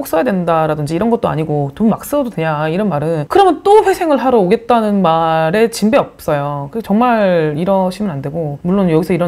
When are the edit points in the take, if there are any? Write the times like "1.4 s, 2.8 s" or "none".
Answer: none